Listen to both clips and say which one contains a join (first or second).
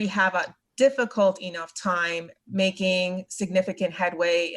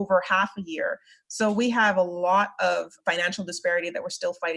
second